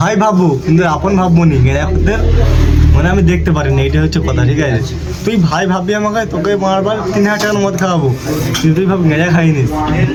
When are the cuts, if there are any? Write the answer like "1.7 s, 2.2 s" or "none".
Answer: none